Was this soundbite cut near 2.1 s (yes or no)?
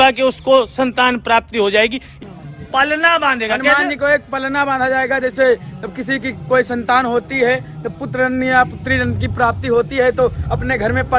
yes